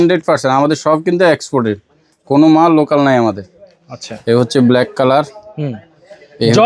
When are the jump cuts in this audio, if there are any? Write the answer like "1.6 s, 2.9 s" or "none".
none